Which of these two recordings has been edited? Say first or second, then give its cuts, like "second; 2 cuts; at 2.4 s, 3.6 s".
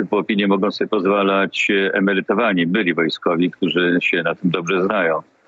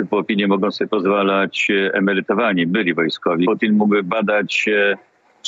second; 1 cut; at 3.5 s